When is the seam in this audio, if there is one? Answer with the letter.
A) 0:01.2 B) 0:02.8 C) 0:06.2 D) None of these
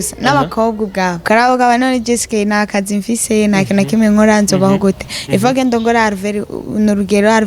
A